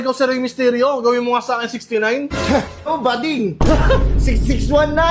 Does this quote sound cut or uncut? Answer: uncut